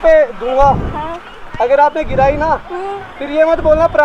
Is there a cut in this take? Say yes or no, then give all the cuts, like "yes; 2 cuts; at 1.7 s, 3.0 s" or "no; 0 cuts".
no; 0 cuts